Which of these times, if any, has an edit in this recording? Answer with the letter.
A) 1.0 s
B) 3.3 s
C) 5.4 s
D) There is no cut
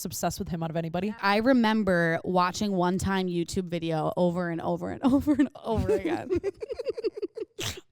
A